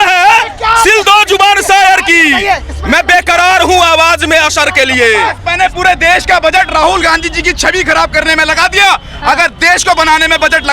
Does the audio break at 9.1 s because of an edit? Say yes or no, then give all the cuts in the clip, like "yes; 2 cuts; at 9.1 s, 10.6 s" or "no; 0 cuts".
no; 1 cut; at 5.4 s